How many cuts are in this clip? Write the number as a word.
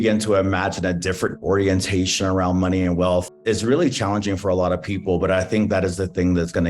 two